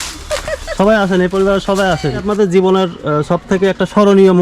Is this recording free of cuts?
no; 1 cut; at 2.3 s

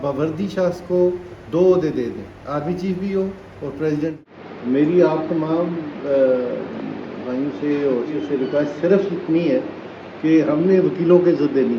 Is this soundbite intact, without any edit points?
no; 2 cuts; at 4.5 s, 8.1 s

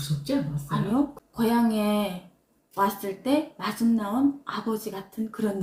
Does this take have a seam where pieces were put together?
no; 0 cuts

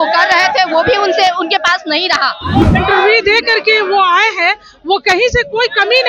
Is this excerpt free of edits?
no; 1 cut; at 2.7 s

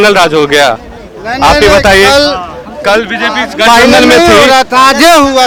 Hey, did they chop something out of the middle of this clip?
no; 0 cuts

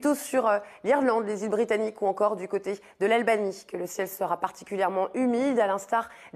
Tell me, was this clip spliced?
yes; 1 cut; at 1.1 s

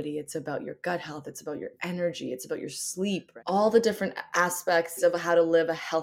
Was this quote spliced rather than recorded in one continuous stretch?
yes; 2 cuts; at 3.3 s, 5.0 s

